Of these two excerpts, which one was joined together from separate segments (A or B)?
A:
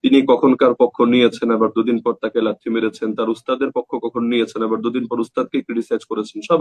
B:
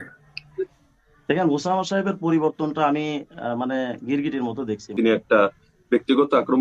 B